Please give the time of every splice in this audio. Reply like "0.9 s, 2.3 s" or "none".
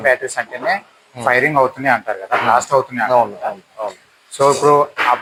none